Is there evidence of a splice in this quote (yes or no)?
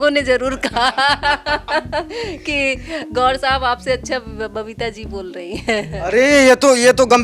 no